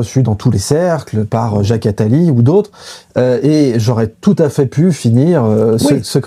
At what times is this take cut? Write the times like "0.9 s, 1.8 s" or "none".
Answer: none